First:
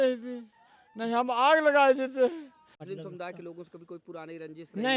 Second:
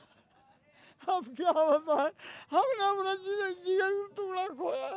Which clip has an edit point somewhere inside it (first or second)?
first